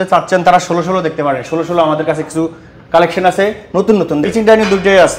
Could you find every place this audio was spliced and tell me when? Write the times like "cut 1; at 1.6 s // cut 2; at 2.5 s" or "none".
cut 1; at 4.3 s